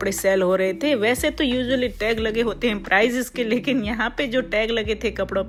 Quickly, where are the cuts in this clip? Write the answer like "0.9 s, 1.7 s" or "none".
none